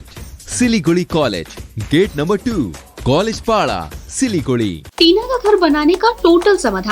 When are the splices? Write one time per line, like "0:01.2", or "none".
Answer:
0:04.8

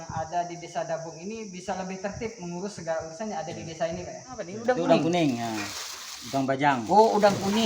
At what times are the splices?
0:04.5

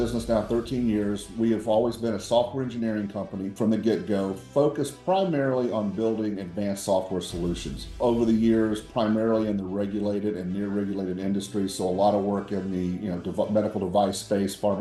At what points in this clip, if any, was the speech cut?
0:03.5
0:08.0

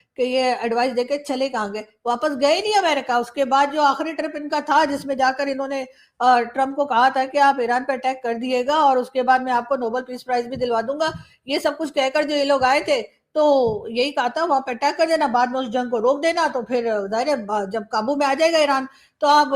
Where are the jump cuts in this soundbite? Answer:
none

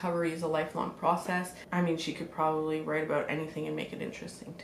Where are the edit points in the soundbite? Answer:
0:01.6

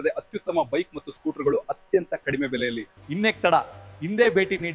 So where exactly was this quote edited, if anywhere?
0:02.9

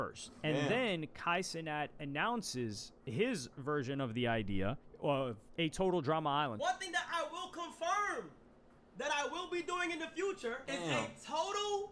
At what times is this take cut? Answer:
0:06.6
0:10.6

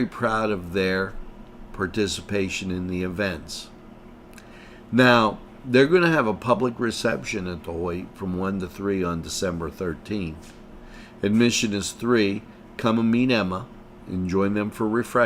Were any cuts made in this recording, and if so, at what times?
none

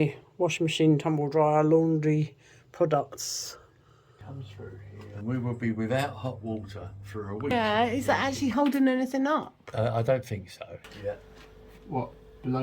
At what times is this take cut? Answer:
0:05.1
0:07.5
0:10.9

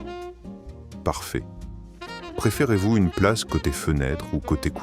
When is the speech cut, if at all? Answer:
0:01.0

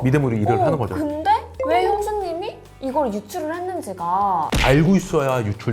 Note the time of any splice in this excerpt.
0:04.5

